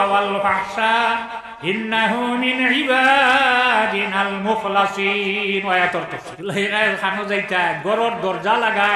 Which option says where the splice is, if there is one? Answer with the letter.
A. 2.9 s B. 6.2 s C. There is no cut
B